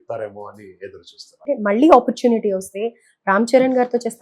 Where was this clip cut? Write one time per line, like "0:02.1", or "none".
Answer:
0:01.3